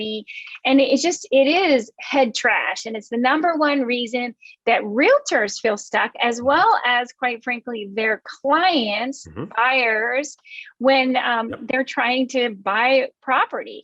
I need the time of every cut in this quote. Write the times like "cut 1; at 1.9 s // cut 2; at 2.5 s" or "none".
cut 1; at 2.8 s